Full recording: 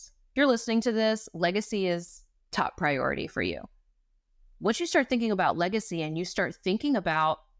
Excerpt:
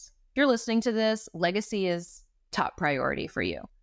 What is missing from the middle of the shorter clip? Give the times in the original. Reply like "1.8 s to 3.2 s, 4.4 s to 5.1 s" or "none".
none